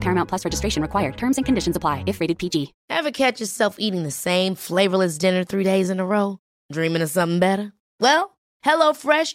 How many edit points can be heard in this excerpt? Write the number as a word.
one